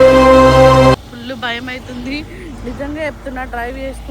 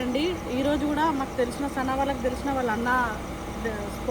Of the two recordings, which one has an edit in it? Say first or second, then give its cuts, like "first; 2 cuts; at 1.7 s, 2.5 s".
first; 1 cut; at 1.1 s